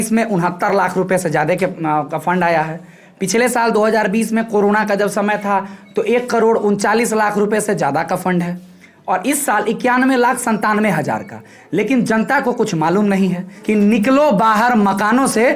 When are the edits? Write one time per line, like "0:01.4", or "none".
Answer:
0:13.5